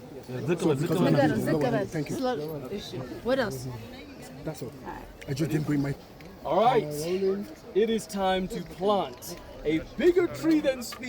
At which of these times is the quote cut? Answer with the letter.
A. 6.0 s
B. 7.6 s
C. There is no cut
A